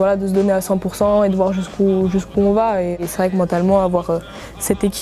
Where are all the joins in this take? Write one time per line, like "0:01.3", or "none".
0:03.1